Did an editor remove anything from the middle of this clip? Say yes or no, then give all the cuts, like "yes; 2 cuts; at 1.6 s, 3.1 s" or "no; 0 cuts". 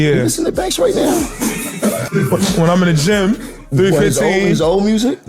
yes; 1 cut; at 2.0 s